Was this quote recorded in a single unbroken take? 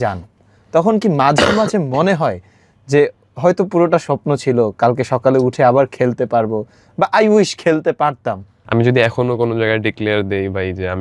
no; 1 cut; at 8.5 s

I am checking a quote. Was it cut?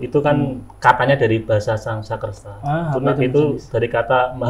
no; 0 cuts

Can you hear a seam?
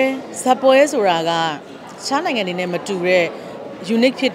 no; 0 cuts

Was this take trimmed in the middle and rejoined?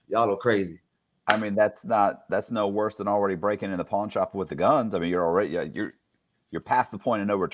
no; 0 cuts

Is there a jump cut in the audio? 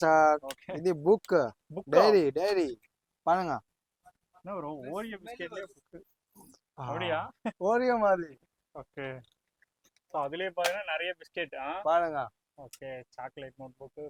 no; 0 cuts

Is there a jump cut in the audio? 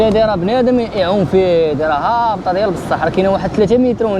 no; 0 cuts

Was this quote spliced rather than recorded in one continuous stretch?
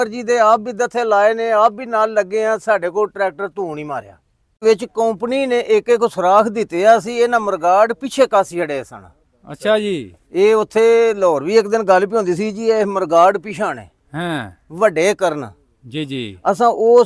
yes; 1 cut; at 4.6 s

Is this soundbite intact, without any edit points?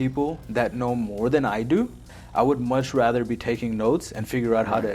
no; 1 cut; at 2.1 s

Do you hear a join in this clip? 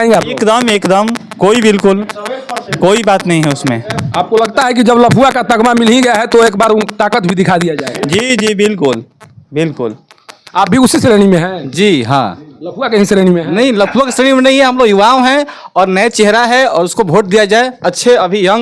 no; 0 cuts

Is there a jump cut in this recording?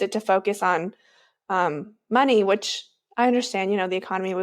no; 0 cuts

